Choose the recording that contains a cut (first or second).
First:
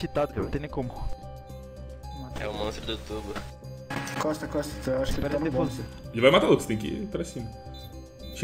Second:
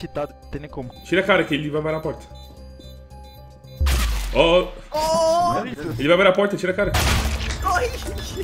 second